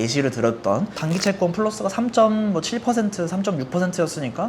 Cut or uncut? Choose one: cut